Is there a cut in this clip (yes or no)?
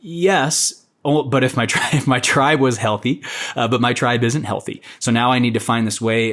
no